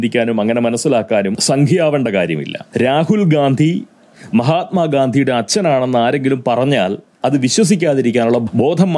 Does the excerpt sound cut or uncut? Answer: cut